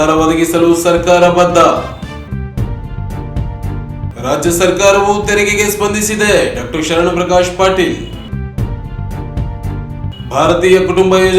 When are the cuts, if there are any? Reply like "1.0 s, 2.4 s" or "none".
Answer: none